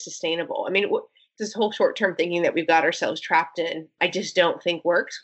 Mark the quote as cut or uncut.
cut